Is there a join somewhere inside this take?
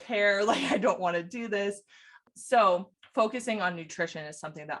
yes; 2 cuts; at 2.2 s, 3.0 s

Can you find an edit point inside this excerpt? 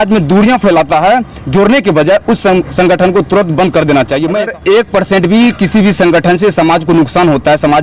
yes; 1 cut; at 4.4 s

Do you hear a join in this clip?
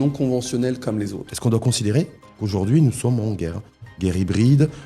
yes; 1 cut; at 1.2 s

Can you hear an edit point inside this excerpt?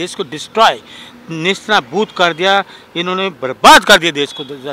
no; 0 cuts

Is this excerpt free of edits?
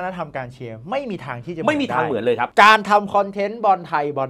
no; 1 cut; at 2.5 s

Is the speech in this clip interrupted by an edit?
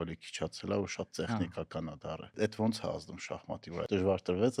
yes; 2 cuts; at 2.3 s, 3.8 s

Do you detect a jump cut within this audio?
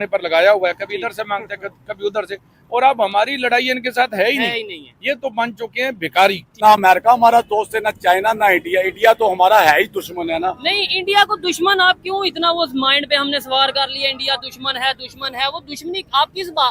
yes; 1 cut; at 6.5 s

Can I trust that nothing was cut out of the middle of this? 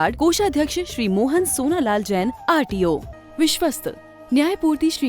no; 1 cut; at 3.1 s

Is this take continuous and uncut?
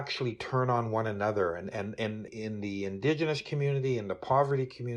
no; 1 cut; at 2.2 s

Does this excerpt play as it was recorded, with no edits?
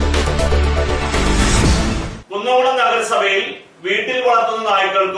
yes; 0 cuts

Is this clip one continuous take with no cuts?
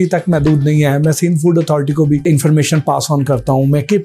no; 1 cut; at 2.2 s

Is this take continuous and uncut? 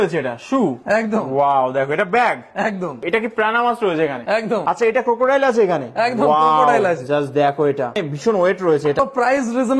no; 4 cuts; at 3.0 s, 4.7 s, 7.9 s, 9.0 s

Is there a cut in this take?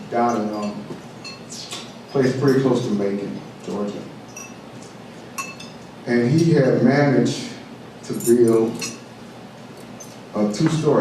no; 0 cuts

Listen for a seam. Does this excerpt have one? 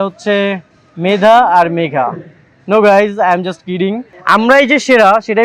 yes; 1 cut; at 4.1 s

